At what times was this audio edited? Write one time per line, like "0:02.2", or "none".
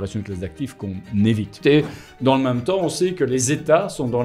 0:01.6

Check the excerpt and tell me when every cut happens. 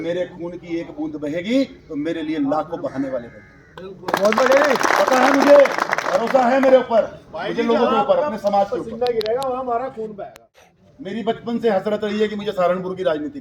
0:10.7

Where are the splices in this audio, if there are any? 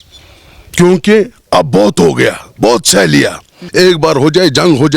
0:03.6

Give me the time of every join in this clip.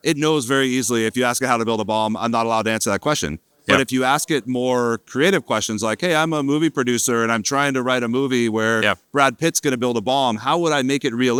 none

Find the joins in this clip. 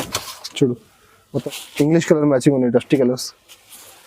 0:01.4

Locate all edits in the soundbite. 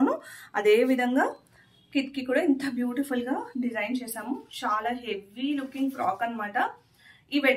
none

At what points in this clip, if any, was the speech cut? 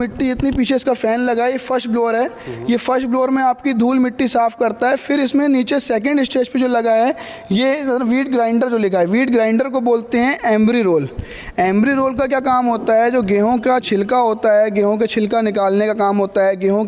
none

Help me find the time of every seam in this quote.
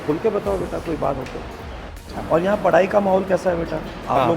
0:02.1

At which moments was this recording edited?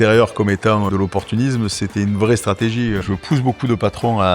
0:00.9
0:03.0

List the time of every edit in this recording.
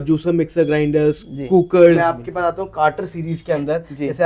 0:02.0

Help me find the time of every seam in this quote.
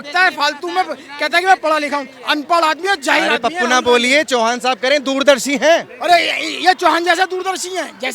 none

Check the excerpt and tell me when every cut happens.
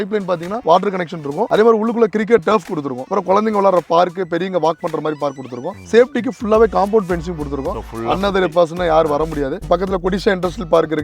0:01.4
0:05.7
0:09.6

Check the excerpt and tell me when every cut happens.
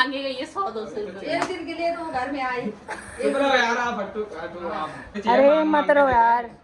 0:05.1

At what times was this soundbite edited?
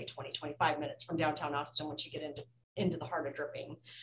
none

